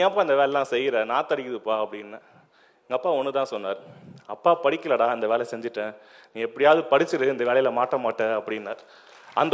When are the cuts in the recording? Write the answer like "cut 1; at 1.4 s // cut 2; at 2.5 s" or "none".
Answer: none